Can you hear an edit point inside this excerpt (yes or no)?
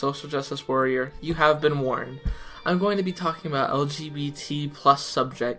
yes